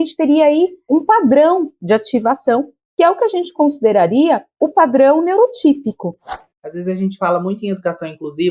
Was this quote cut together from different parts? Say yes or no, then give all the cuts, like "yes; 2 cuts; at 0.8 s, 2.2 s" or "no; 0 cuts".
yes; 1 cut; at 6.3 s